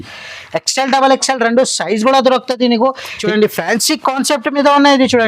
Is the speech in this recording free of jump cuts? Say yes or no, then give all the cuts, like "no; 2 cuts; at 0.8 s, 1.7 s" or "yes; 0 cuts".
no; 1 cut; at 3.1 s